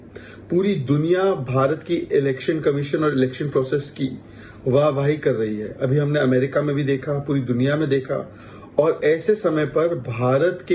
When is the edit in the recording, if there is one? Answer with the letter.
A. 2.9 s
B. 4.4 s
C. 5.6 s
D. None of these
C